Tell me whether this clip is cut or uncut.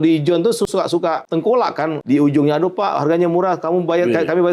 cut